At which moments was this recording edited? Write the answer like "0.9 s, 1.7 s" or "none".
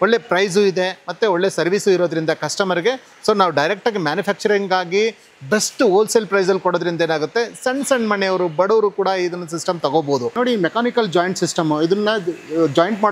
10.3 s